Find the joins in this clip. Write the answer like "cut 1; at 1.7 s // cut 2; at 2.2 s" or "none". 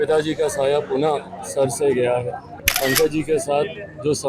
cut 1; at 2.7 s